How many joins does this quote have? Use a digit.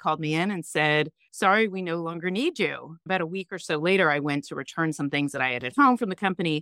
2